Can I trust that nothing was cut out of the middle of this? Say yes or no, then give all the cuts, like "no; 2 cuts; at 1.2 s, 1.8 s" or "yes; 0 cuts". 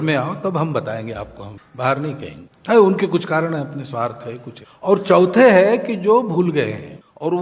yes; 0 cuts